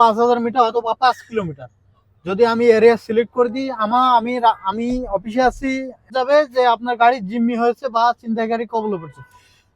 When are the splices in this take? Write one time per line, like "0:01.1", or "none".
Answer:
0:06.1